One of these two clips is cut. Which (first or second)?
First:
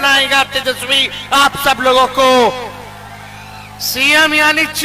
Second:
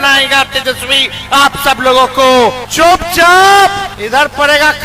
second